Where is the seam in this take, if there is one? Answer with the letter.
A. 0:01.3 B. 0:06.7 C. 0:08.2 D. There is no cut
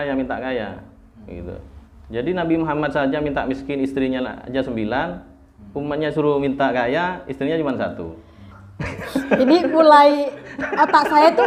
D